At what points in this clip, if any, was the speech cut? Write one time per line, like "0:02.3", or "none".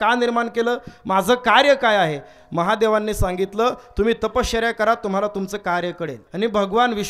0:06.2